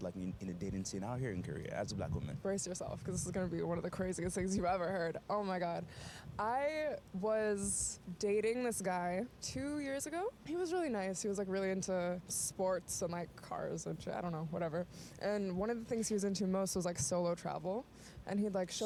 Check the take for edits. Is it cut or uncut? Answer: uncut